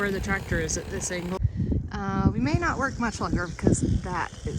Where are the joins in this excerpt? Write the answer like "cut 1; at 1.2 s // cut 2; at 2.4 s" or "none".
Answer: cut 1; at 1.4 s

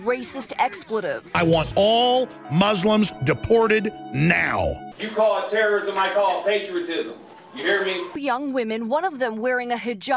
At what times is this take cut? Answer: cut 1; at 1.3 s // cut 2; at 4.9 s // cut 3; at 8.1 s

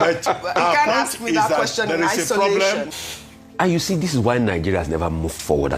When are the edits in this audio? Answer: cut 1; at 2.9 s

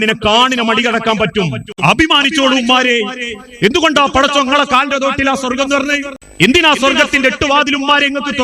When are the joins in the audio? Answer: cut 1; at 1.8 s // cut 2; at 6.2 s

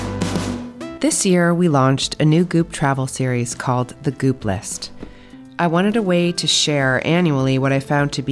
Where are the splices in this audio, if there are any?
cut 1; at 0.9 s

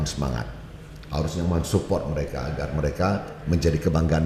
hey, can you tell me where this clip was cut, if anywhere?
none

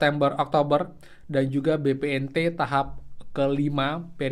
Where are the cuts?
none

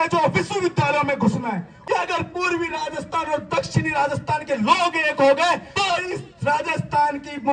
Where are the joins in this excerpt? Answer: cut 1; at 1.7 s // cut 2; at 5.7 s

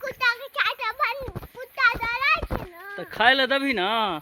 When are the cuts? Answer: none

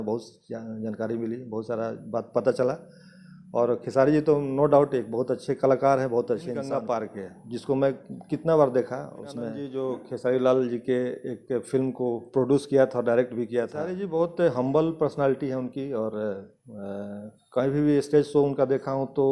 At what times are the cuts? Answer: cut 1; at 6.7 s // cut 2; at 9.7 s // cut 3; at 14.0 s

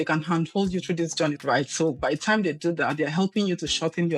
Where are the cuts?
cut 1; at 1.4 s

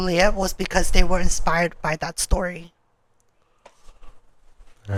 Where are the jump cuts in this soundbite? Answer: none

